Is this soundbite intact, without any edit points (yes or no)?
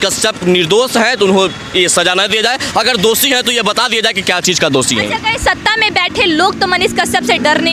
yes